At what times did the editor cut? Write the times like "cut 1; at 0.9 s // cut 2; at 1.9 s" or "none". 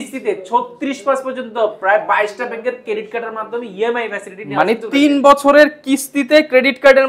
none